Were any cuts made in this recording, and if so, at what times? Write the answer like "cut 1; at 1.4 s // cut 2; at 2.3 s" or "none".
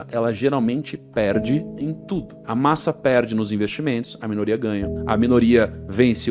none